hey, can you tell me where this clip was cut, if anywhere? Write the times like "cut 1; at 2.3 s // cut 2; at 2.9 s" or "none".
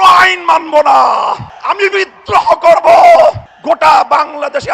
cut 1; at 1.5 s // cut 2; at 3.5 s